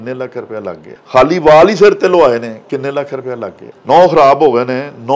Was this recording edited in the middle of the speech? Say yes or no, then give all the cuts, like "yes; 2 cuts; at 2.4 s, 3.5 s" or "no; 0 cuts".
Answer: yes; 2 cuts; at 0.9 s, 3.7 s